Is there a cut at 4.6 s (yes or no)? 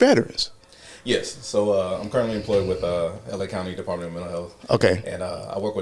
no